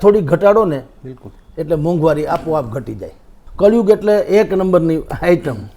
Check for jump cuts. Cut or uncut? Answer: cut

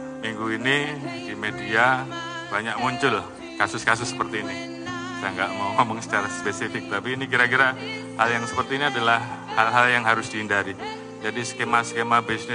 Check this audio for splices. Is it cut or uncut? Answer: uncut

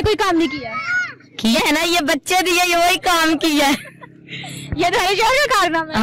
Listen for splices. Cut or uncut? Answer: cut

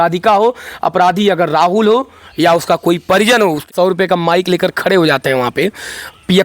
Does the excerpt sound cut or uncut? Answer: cut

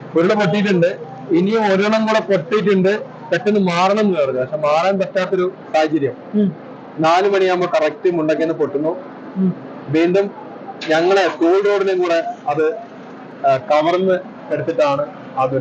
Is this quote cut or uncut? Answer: uncut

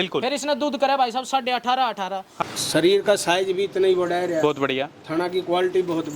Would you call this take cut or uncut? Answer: cut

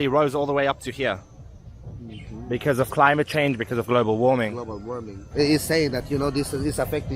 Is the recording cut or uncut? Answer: uncut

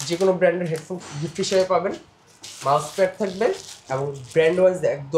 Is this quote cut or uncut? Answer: uncut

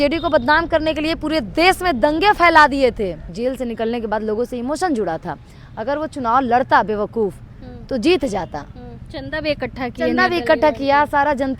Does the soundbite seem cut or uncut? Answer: cut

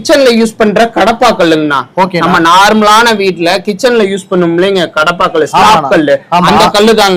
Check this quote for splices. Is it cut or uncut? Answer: uncut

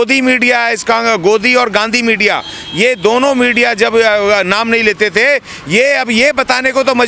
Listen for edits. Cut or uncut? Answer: uncut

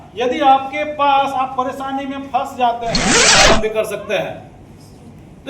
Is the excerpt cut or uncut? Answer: cut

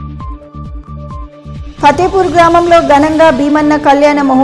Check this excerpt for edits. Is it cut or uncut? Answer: cut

